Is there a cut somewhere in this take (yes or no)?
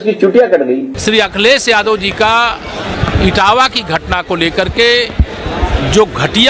no